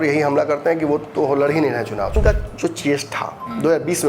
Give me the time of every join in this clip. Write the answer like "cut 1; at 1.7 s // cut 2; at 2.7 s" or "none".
cut 1; at 2.1 s